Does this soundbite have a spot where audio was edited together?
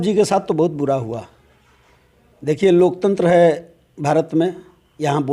no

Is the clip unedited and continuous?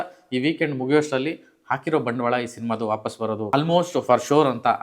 no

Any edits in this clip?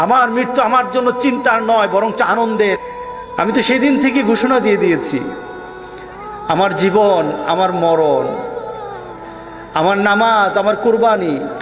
yes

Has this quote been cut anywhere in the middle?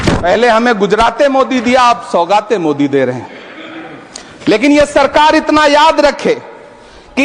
no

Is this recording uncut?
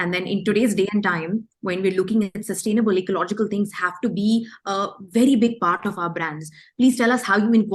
yes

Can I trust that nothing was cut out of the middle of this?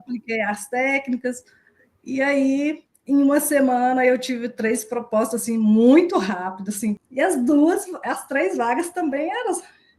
no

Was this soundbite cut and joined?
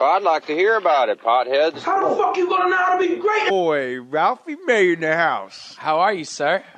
no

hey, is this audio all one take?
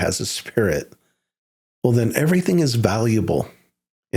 yes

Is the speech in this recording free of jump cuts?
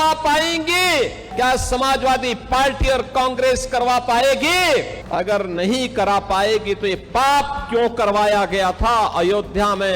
no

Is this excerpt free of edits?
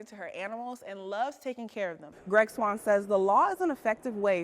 no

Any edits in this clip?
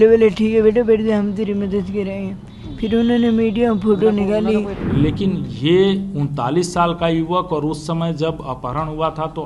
yes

